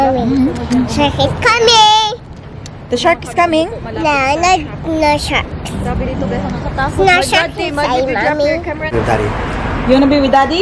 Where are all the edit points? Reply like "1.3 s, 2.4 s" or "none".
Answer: 8.9 s